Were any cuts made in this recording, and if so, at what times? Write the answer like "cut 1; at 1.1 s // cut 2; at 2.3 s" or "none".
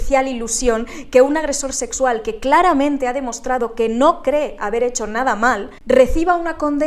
cut 1; at 5.8 s

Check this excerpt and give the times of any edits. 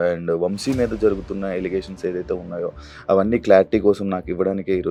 none

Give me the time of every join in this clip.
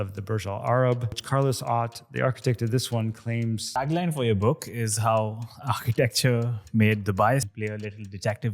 cut 1; at 1.2 s // cut 2; at 3.8 s // cut 3; at 7.5 s

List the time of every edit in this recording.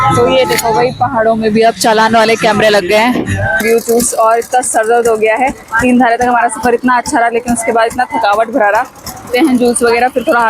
cut 1; at 3.6 s // cut 2; at 9.2 s

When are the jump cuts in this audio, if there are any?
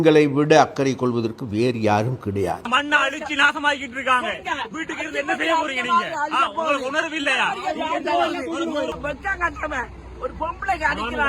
cut 1; at 2.7 s // cut 2; at 9.0 s

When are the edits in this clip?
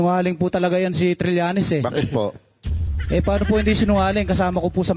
none

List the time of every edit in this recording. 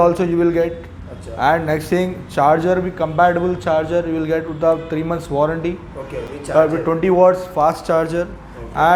none

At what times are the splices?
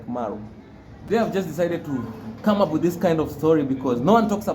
cut 1; at 1.0 s

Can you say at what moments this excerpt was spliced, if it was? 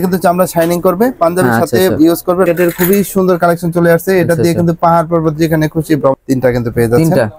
cut 1; at 2.5 s // cut 2; at 6.2 s

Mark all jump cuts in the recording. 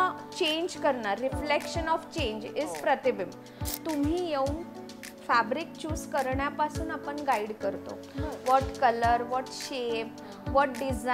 cut 1; at 3.8 s

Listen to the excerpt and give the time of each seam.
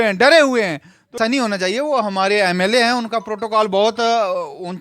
cut 1; at 1.2 s

